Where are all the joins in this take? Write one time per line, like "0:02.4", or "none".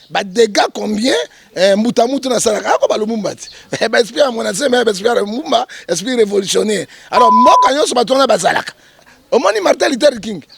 0:09.1